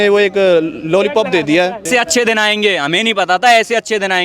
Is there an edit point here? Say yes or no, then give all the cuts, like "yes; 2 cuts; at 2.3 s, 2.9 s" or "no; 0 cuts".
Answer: yes; 1 cut; at 1.9 s